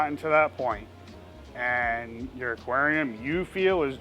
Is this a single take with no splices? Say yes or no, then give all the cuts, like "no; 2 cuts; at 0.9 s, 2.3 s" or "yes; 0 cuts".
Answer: yes; 0 cuts